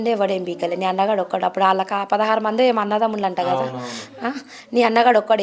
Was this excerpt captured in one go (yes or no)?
yes